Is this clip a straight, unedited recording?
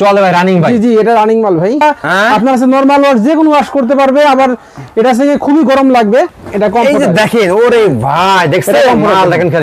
no; 2 cuts; at 1.8 s, 6.4 s

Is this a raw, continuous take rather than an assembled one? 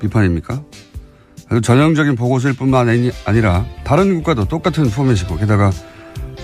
no; 1 cut; at 4.9 s

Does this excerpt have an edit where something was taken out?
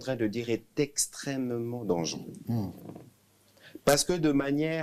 no; 0 cuts

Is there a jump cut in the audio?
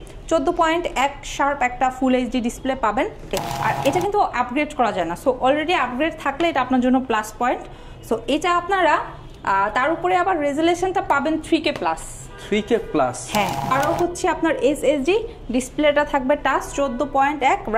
yes; 2 cuts; at 3.4 s, 13.7 s

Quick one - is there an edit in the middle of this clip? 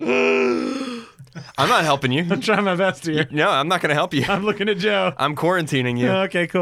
no; 0 cuts

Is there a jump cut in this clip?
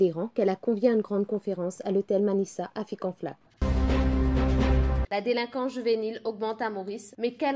no; 0 cuts

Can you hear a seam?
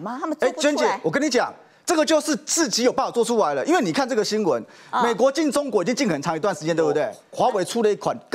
yes; 1 cut; at 7.2 s

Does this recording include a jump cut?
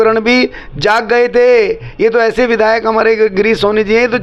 no; 0 cuts

